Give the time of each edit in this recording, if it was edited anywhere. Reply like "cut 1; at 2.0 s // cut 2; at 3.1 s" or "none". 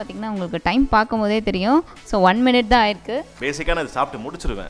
cut 1; at 3.3 s